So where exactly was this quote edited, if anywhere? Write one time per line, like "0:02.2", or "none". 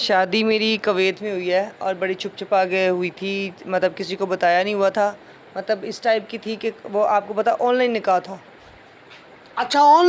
none